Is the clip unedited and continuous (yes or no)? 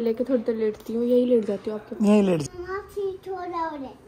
no